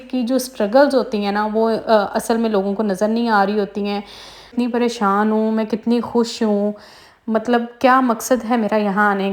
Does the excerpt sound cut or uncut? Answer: cut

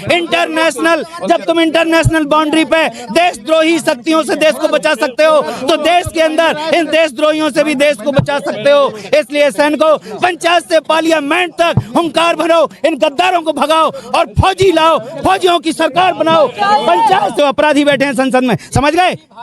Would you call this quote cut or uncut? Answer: cut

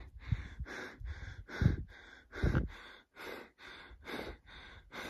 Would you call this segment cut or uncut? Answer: uncut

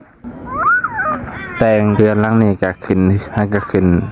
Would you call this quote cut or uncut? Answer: cut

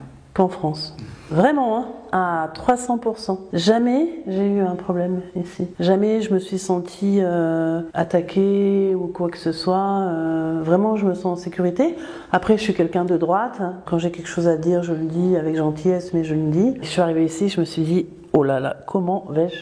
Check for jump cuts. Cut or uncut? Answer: cut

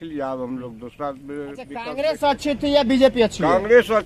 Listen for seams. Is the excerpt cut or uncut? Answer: cut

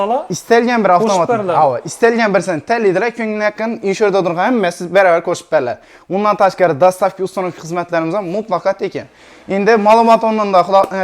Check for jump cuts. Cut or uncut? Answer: uncut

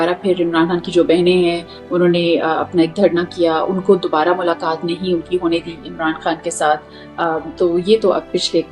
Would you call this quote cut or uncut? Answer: uncut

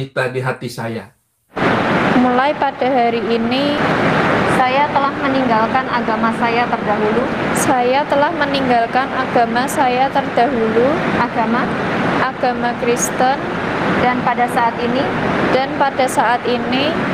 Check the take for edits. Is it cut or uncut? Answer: cut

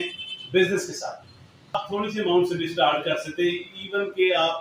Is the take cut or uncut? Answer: cut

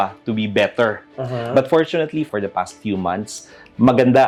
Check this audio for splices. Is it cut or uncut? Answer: uncut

